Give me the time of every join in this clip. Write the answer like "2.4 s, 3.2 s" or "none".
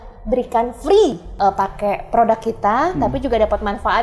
1.2 s